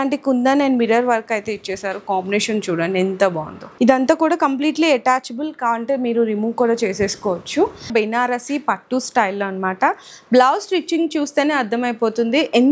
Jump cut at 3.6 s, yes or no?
yes